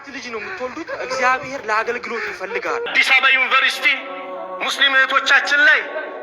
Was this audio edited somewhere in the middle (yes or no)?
yes